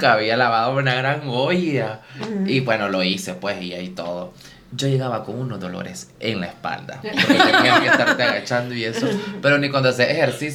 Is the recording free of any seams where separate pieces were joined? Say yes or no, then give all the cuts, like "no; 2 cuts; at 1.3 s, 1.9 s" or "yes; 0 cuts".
yes; 0 cuts